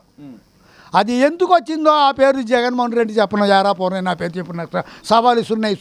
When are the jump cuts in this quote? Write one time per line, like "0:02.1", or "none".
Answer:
none